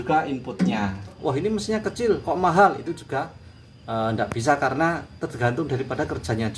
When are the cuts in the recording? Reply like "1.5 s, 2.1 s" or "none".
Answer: 1.2 s